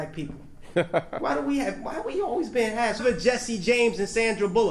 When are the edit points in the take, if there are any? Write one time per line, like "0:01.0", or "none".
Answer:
none